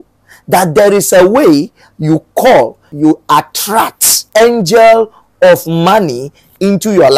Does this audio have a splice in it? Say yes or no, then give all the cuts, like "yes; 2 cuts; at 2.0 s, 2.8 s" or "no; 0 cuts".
yes; 2 cuts; at 2.9 s, 4.2 s